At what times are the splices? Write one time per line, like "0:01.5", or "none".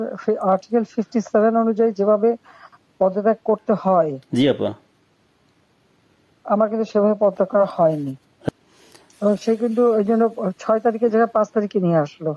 0:08.5